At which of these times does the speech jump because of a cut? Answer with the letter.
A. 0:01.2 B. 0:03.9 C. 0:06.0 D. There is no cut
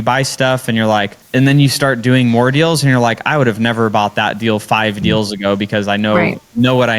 A